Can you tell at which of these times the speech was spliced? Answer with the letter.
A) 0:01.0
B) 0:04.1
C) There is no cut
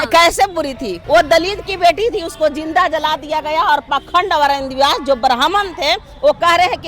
A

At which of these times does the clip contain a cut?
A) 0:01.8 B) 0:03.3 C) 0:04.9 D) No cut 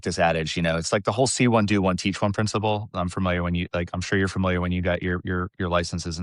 D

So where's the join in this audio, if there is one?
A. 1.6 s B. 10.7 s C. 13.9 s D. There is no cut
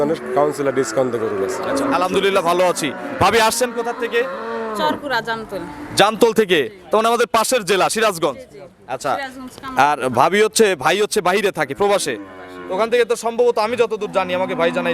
A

